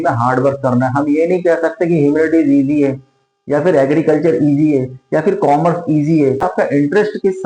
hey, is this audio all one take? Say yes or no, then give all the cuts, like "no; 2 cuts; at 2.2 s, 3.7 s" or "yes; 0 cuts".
no; 1 cut; at 6.5 s